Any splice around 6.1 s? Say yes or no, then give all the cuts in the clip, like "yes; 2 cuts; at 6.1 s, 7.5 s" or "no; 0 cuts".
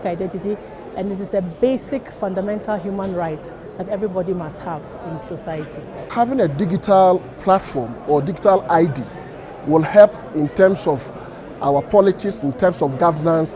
yes; 1 cut; at 6.1 s